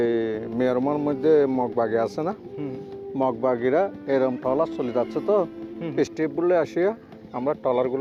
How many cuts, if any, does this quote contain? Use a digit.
0